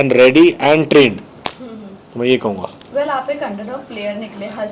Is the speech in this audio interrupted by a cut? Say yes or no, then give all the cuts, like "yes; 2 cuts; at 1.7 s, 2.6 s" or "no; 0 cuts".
no; 0 cuts